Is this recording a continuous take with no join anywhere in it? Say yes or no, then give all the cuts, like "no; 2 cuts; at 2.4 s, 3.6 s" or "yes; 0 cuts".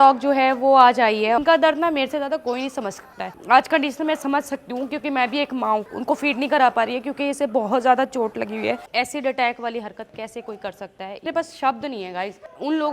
no; 5 cuts; at 1.4 s, 3.4 s, 5.8 s, 8.8 s, 11.3 s